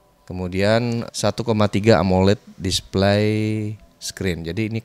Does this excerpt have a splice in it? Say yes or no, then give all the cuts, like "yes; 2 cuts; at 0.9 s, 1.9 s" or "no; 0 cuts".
yes; 1 cut; at 1.1 s